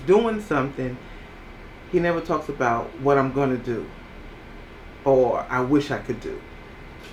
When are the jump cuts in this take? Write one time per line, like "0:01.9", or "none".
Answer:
none